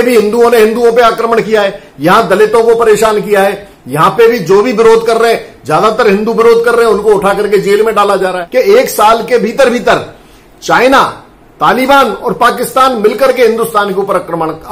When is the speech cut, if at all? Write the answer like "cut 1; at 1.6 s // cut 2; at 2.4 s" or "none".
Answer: cut 1; at 8.4 s